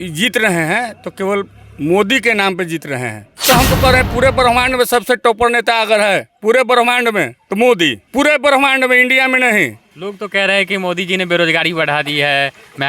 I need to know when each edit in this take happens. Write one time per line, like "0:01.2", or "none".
0:03.4
0:07.4
0:08.0
0:09.9